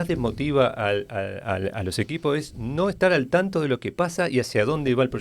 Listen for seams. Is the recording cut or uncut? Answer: uncut